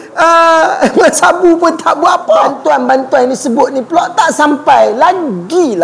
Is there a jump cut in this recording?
yes; 1 cut; at 2.5 s

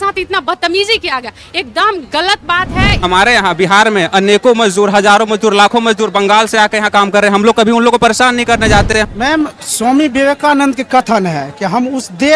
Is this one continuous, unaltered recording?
no; 2 cuts; at 3.0 s, 8.9 s

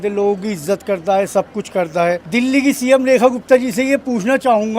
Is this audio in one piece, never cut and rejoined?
no; 1 cut; at 2.2 s

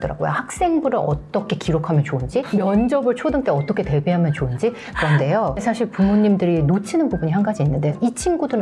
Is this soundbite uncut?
no; 1 cut; at 5.6 s

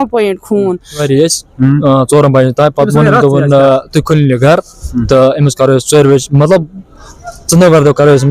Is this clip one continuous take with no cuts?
no; 1 cut; at 1.0 s

